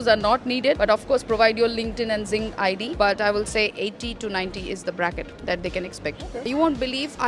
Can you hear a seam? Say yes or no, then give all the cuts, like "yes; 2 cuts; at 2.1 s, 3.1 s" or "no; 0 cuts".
yes; 3 cuts; at 0.8 s, 2.9 s, 6.4 s